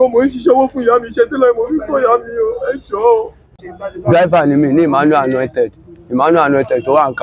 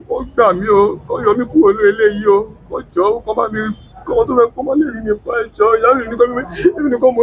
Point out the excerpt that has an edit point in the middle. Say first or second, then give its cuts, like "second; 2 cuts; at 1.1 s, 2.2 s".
first; 1 cut; at 3.5 s